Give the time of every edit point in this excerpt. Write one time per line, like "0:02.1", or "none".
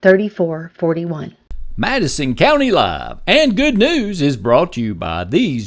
0:01.3